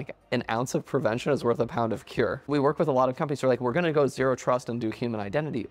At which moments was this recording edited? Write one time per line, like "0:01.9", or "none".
0:02.4